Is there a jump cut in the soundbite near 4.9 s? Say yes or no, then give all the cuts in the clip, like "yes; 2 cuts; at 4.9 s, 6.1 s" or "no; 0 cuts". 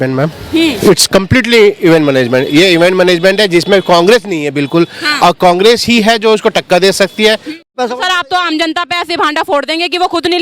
no; 1 cut; at 7.7 s